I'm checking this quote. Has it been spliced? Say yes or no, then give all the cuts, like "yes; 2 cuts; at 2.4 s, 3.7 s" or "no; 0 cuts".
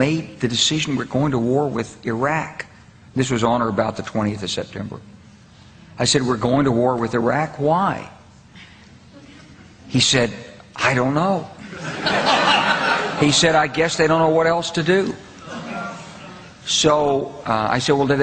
no; 0 cuts